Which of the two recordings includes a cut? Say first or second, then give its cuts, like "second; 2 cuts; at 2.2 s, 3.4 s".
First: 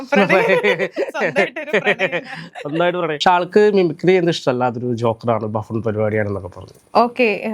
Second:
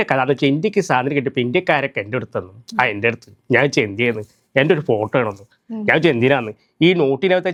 first; 1 cut; at 3.2 s